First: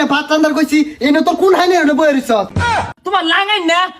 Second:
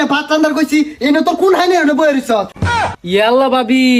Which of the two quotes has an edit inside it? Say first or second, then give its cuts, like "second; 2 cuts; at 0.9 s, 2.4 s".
first; 1 cut; at 2.9 s